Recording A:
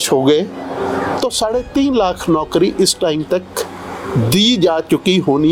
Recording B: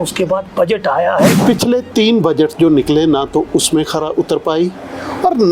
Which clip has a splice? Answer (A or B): B